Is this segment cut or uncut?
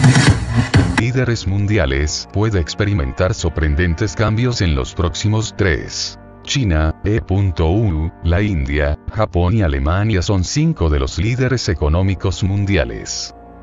uncut